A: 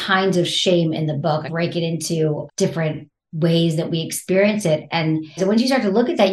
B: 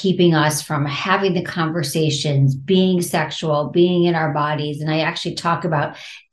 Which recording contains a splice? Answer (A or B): A